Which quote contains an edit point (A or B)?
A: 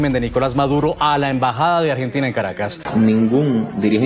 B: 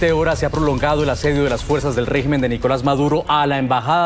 A